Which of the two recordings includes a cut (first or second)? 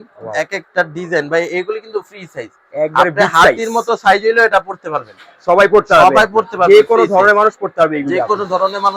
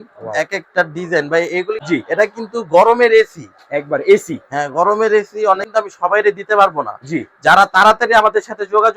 second